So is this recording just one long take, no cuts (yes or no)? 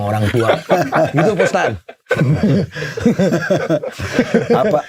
yes